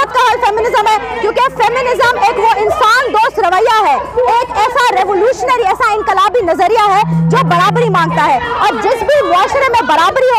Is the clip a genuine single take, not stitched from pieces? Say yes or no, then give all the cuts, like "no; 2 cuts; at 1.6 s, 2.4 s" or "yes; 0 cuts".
yes; 0 cuts